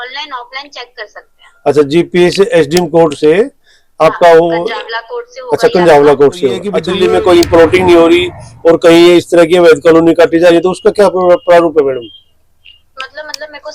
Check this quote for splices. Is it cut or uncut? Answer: cut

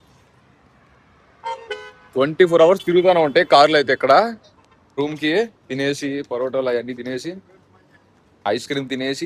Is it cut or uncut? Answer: cut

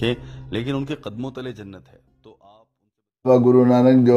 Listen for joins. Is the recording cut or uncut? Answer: cut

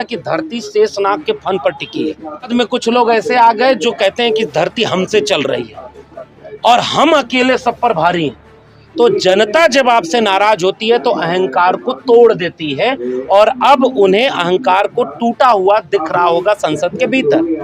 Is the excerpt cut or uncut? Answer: cut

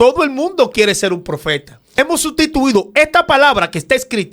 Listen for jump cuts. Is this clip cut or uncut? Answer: cut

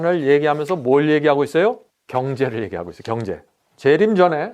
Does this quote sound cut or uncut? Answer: cut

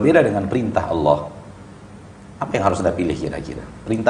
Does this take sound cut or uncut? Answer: uncut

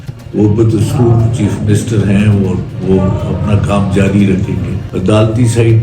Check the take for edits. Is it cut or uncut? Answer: cut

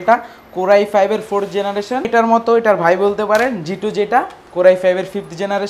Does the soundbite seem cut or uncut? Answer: cut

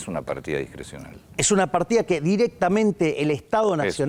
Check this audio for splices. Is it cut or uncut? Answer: uncut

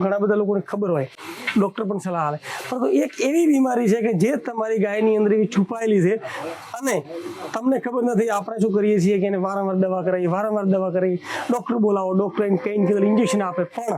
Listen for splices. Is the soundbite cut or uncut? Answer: uncut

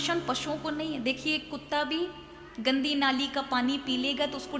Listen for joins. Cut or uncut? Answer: uncut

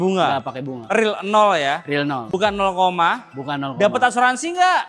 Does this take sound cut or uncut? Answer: uncut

